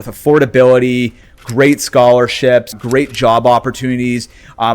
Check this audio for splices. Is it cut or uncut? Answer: cut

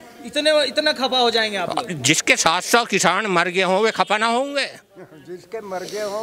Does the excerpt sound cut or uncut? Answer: uncut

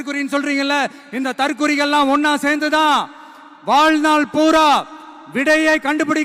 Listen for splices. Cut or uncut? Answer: uncut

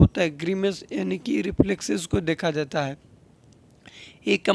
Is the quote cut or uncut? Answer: uncut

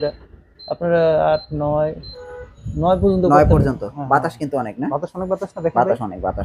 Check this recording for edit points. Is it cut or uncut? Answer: uncut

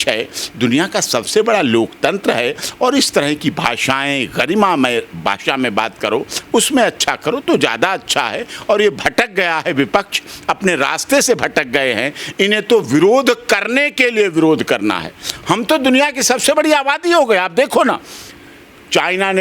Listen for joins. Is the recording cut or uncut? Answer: uncut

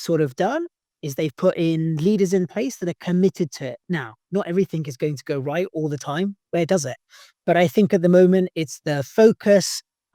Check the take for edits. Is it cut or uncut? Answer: uncut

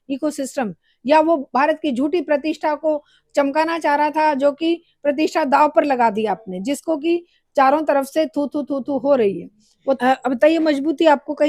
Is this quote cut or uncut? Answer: cut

